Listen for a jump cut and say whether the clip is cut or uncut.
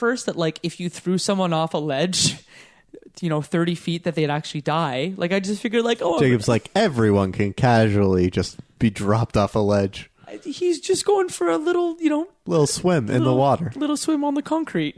uncut